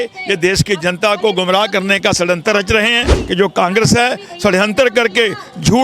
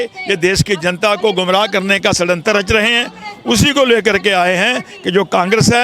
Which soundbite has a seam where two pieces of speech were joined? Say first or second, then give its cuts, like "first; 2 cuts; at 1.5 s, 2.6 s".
first; 1 cut; at 3.2 s